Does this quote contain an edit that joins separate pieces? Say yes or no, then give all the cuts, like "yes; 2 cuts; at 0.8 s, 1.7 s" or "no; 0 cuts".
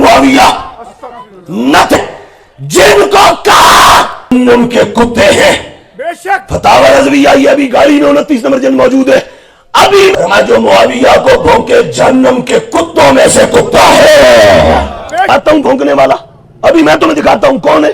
yes; 4 cuts; at 2.0 s, 4.3 s, 10.1 s, 15.3 s